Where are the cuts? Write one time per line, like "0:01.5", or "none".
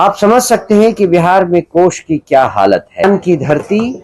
0:03.0